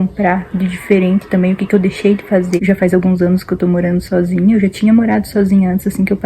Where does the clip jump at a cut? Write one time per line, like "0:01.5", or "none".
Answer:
0:02.6